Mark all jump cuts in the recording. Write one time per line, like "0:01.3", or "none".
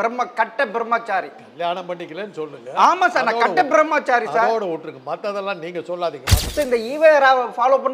0:06.3